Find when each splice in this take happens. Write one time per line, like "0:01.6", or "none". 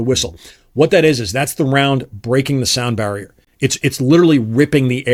none